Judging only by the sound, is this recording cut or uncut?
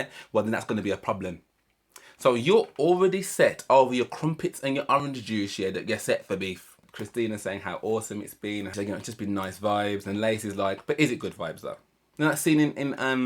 cut